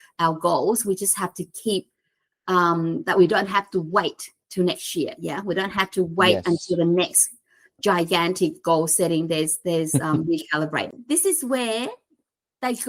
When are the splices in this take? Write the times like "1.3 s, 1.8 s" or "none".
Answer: 10.9 s